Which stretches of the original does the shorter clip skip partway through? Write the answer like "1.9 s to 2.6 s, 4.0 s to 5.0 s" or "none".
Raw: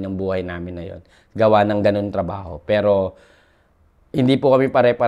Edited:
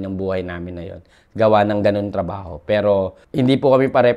3.2 s to 4.0 s